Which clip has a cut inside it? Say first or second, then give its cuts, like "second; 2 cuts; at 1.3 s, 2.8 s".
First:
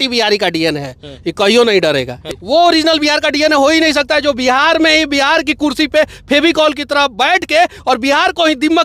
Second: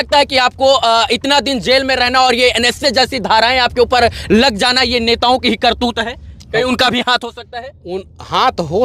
first; 1 cut; at 2.2 s